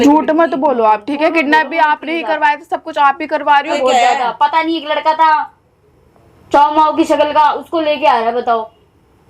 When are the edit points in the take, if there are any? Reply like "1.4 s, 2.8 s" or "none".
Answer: 3.7 s